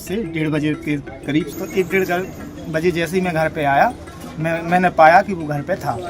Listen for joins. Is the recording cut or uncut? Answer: cut